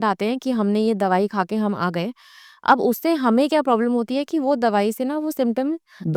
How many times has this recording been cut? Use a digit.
0